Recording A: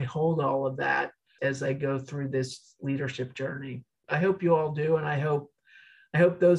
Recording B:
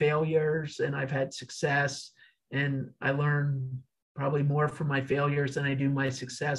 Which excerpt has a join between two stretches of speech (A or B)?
A